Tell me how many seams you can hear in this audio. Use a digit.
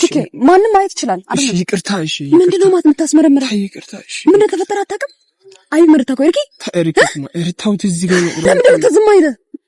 1